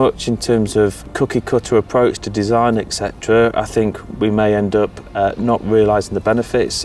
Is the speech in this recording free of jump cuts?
no; 1 cut; at 1.0 s

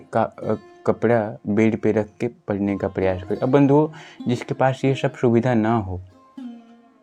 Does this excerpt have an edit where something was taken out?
no; 0 cuts

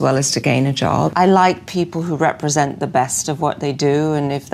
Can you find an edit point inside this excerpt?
yes; 1 cut; at 1.1 s

